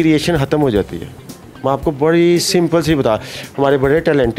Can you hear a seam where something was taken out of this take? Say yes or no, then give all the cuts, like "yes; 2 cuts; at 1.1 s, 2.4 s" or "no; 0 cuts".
no; 0 cuts